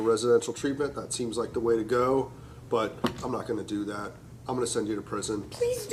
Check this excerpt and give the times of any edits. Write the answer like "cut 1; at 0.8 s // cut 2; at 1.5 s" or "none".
none